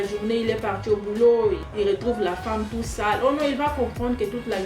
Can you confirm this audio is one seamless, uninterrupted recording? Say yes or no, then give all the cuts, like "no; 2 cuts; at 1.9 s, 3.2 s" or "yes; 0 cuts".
no; 1 cut; at 1.7 s